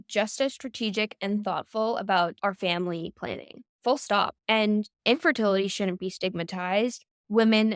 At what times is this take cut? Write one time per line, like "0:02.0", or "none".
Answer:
0:02.3
0:04.3